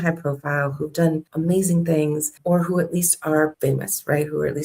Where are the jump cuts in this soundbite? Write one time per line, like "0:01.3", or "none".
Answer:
0:01.3
0:02.3
0:03.6